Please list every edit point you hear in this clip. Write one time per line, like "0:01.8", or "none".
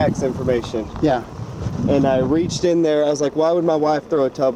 none